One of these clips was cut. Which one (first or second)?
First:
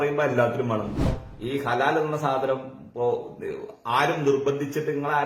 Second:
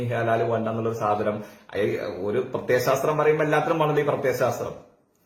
first